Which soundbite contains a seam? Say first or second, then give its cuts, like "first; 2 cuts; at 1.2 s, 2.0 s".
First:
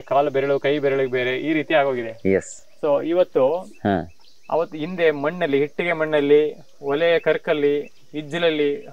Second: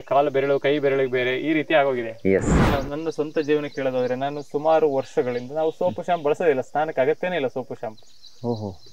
second; 1 cut; at 2.6 s